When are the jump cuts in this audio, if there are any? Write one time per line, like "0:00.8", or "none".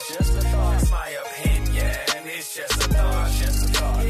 none